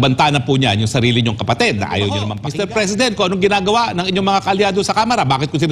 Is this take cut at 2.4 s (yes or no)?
yes